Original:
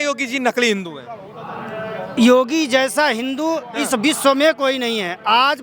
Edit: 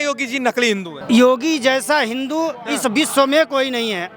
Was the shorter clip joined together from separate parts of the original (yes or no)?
yes